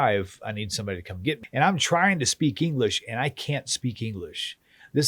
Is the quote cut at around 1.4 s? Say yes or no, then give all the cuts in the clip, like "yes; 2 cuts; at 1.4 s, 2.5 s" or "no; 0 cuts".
yes; 1 cut; at 1.4 s